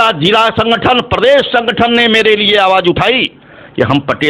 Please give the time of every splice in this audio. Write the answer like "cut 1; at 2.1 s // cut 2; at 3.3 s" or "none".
none